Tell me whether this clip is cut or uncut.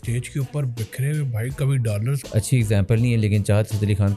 cut